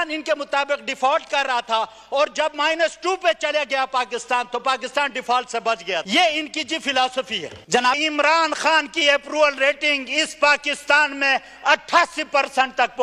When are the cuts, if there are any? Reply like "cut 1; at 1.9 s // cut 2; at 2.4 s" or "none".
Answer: cut 1; at 6.1 s // cut 2; at 8.0 s